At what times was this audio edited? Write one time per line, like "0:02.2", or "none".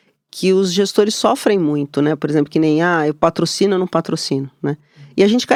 none

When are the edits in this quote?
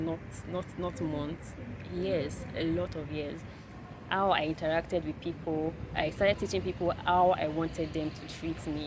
0:03.4

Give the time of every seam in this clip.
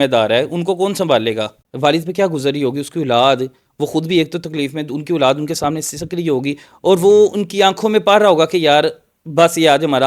0:01.6

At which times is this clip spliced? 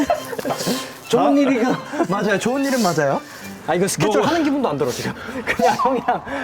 0:03.4

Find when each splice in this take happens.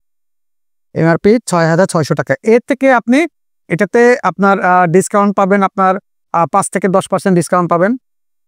none

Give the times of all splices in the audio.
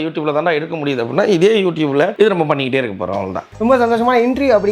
0:02.1
0:03.4

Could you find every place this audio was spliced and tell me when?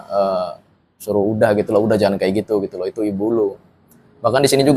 none

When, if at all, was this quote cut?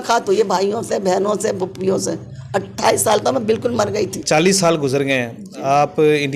0:04.2

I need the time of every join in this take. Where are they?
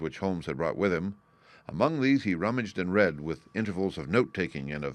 none

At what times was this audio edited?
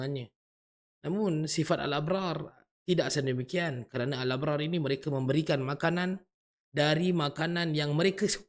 none

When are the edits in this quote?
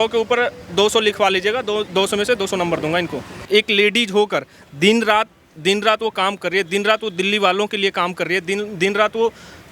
0:03.4

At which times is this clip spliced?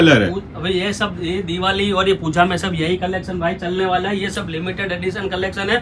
none

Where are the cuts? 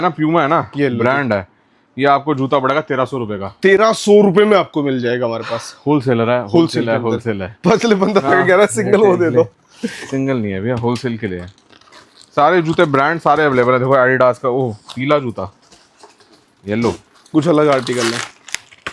none

